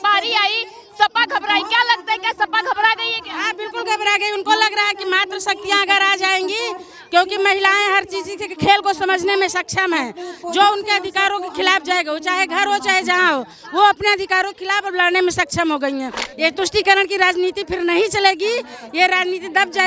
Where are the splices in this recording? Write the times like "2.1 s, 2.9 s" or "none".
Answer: 16.2 s